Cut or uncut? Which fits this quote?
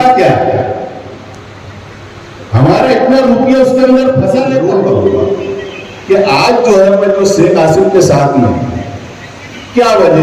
cut